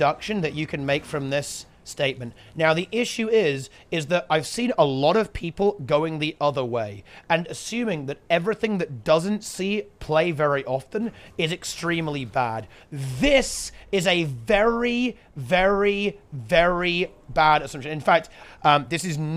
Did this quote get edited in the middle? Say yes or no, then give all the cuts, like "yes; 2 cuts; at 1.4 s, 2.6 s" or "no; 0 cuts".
no; 0 cuts